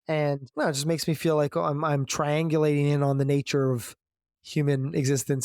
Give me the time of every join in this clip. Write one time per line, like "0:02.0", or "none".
none